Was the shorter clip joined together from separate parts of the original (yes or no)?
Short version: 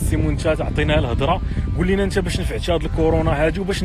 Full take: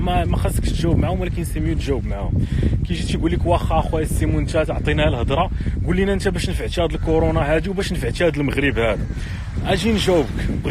no